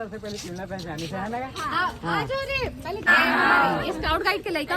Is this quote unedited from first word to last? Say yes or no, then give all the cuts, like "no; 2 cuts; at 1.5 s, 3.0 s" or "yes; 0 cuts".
no; 1 cut; at 3.1 s